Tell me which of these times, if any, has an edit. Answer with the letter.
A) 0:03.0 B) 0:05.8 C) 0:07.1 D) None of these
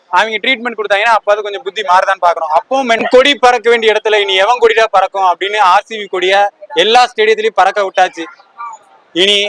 A